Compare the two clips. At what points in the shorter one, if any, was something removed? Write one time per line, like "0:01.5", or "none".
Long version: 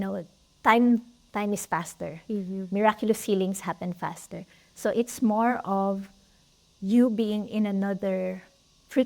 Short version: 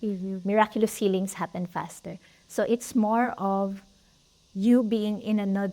none